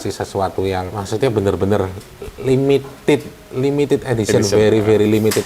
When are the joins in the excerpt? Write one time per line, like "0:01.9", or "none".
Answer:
0:01.0